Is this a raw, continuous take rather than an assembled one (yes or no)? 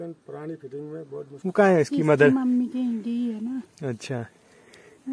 no